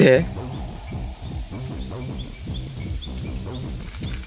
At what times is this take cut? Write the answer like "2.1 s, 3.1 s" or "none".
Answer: none